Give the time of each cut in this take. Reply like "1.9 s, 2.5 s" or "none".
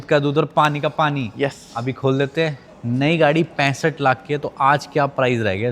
2.6 s

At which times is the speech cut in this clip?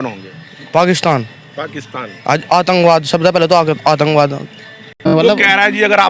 5.1 s

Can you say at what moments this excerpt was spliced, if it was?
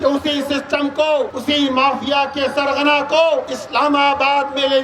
1.3 s

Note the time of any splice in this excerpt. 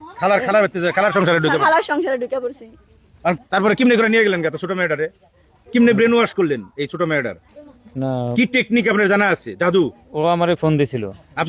3.4 s

